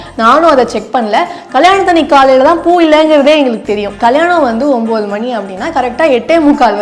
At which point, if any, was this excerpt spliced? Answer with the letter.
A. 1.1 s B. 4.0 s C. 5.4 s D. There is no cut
B